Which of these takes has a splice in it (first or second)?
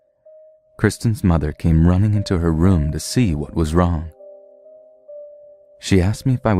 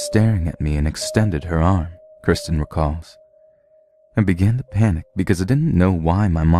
second